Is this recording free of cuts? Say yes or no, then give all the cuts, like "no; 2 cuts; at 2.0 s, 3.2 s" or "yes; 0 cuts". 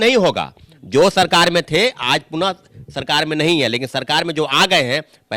yes; 0 cuts